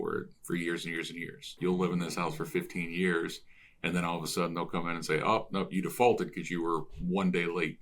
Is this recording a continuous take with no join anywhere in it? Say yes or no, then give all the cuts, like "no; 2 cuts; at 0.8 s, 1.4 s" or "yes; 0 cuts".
no; 1 cut; at 1.6 s